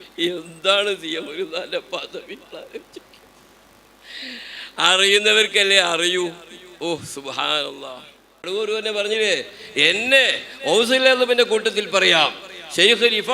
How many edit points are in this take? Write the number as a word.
one